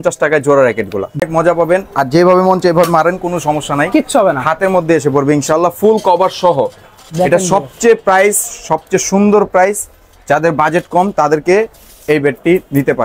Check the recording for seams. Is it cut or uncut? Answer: cut